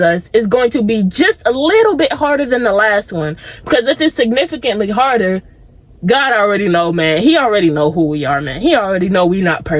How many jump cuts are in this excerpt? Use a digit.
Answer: 0